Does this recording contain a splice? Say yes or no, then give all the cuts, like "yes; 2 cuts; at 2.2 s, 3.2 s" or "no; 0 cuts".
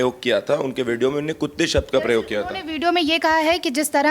no; 0 cuts